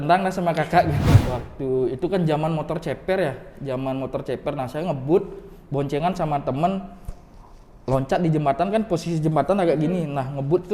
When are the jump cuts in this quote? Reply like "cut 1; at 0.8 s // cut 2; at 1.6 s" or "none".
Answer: cut 1; at 1.1 s

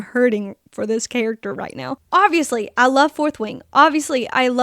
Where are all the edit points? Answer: cut 1; at 1.9 s

